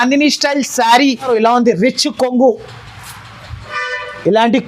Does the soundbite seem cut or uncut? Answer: cut